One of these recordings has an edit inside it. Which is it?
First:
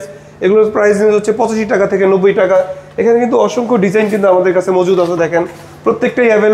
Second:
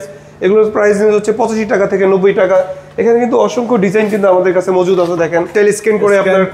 second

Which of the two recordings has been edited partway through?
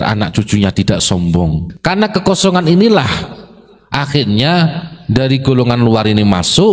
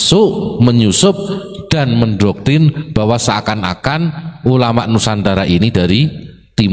first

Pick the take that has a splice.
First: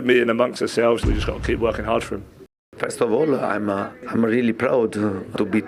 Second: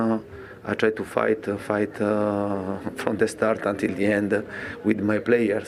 first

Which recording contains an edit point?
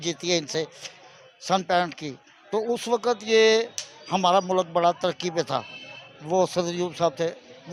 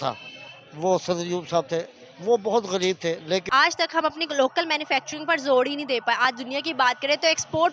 second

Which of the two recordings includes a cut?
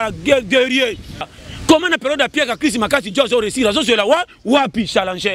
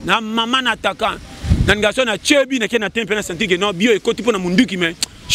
first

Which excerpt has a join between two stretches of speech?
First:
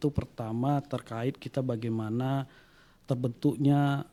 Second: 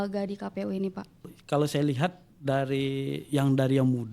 second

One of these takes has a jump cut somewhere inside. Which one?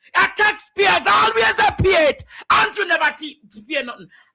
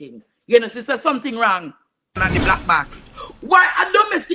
second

